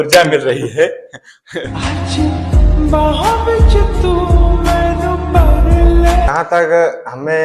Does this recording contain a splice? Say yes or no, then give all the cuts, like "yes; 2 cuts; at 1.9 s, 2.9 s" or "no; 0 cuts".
yes; 1 cut; at 6.3 s